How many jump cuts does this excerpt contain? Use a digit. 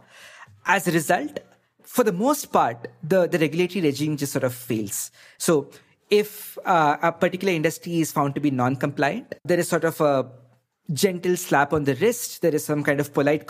2